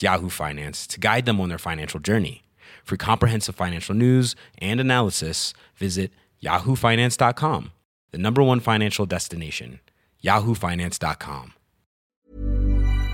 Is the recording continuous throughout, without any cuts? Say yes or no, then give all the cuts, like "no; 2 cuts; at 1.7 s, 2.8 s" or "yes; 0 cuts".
no; 1 cut; at 12.1 s